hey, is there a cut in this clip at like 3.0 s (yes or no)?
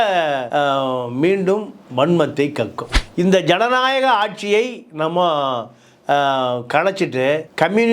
yes